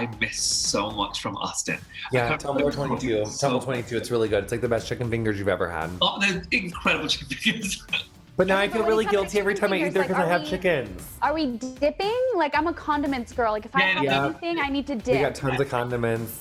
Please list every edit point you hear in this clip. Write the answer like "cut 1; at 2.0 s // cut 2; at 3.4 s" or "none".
none